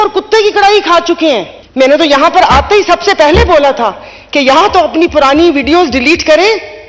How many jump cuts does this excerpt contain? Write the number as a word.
one